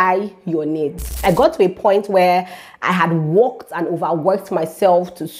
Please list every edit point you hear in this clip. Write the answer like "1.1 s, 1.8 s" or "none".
1.2 s